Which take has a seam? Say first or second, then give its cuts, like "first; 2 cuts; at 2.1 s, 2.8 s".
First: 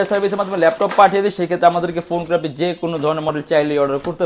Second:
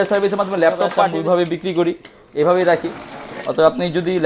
second; 1 cut; at 1.0 s